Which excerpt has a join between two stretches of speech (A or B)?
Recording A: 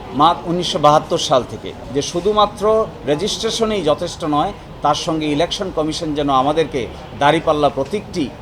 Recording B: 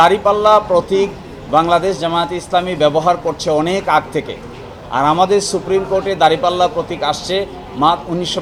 A